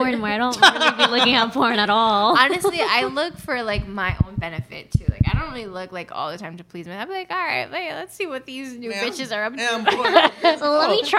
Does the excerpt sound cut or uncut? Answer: uncut